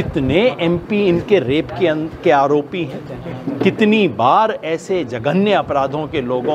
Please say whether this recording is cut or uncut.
uncut